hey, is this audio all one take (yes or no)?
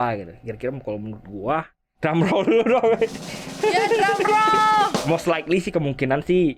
no